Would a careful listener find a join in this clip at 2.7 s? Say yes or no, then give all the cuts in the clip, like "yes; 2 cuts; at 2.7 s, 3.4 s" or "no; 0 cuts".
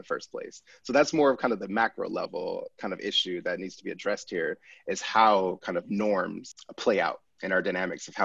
no; 1 cut; at 6.5 s